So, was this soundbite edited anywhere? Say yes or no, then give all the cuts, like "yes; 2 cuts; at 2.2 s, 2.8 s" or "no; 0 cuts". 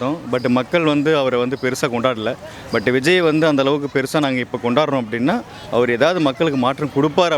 no; 0 cuts